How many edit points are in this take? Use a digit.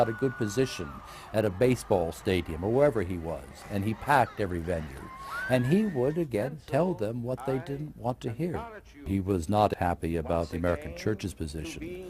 1